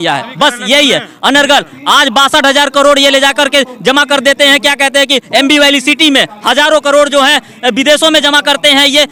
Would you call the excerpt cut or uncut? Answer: uncut